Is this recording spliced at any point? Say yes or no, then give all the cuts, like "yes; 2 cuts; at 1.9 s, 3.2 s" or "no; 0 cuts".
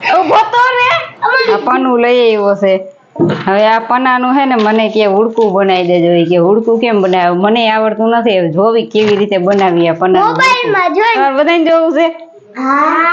yes; 2 cuts; at 1.4 s, 11.2 s